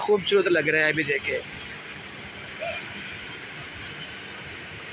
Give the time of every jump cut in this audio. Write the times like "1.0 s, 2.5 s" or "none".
none